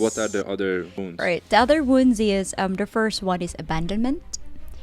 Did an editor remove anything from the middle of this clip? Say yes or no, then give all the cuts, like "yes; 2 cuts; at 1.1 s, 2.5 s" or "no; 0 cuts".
yes; 1 cut; at 1.0 s